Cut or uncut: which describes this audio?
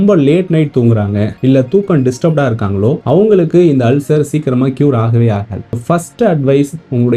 cut